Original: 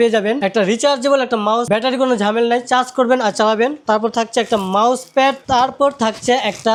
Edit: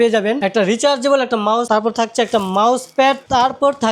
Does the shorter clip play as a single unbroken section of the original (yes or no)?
no